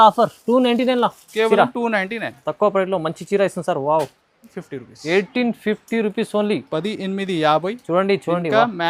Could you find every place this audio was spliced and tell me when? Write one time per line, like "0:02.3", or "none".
0:04.5